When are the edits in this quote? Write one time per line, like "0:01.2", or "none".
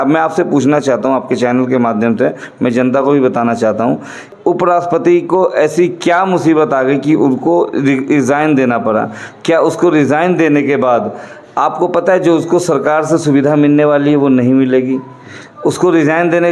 0:04.3